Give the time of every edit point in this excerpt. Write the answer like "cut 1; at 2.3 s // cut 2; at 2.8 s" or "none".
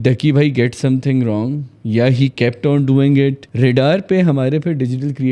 cut 1; at 3.4 s